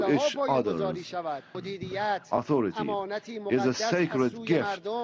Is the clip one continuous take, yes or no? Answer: no